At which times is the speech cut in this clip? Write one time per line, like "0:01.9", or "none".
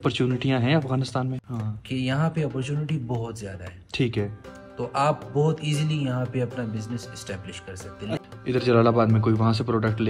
0:01.4
0:08.2